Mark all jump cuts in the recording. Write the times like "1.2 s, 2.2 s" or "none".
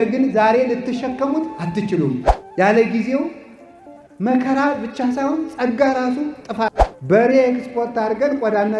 2.4 s, 6.9 s